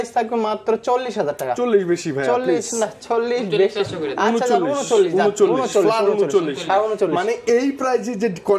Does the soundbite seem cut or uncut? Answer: uncut